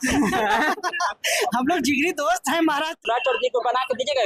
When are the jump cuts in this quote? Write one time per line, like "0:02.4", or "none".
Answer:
0:03.0